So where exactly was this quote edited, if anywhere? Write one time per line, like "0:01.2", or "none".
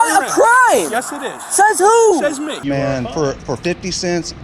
0:02.6